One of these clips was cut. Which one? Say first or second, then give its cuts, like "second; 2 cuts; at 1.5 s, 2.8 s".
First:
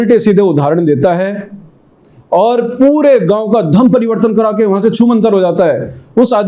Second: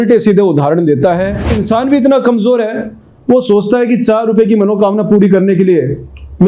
second; 1 cut; at 1.5 s